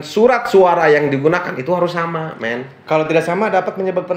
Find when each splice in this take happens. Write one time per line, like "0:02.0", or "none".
none

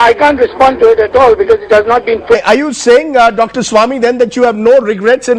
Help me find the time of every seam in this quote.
none

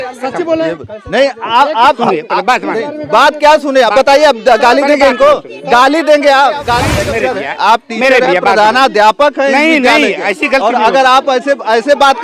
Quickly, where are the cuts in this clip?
0:07.0

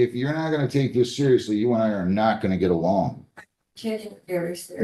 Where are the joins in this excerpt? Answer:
none

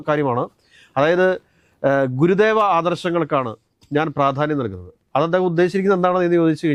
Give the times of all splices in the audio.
none

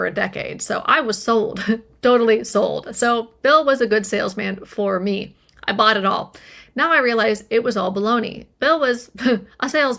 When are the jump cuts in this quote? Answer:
none

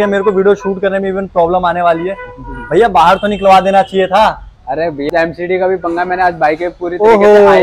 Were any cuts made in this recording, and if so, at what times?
0:05.1

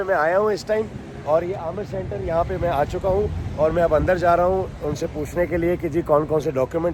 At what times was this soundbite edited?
none

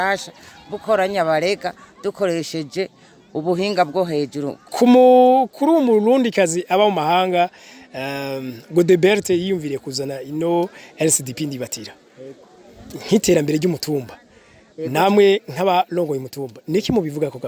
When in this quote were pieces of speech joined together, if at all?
0:04.6

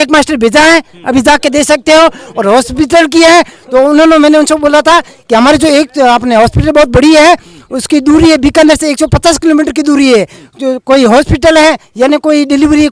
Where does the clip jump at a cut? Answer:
none

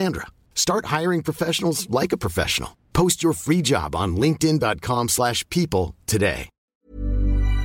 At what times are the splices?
0:06.7

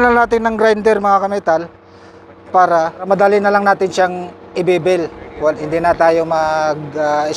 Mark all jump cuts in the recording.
0:03.0

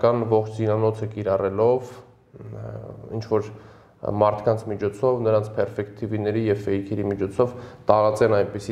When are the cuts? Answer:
none

